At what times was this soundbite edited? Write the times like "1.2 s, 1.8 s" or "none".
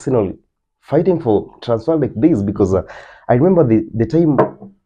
none